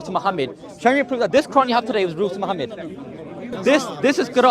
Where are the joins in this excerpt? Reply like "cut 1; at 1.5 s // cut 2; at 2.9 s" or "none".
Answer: cut 1; at 3.5 s